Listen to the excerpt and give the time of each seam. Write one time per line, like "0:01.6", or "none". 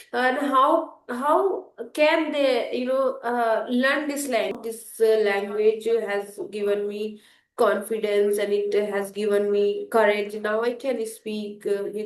0:04.5